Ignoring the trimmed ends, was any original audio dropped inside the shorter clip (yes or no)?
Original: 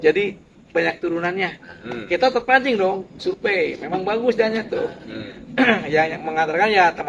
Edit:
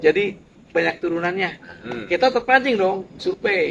no